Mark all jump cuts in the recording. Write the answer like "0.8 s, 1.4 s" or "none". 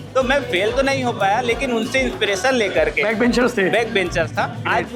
none